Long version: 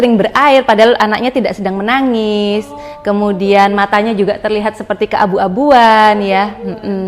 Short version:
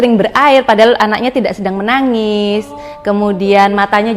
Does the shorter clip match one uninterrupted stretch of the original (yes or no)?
yes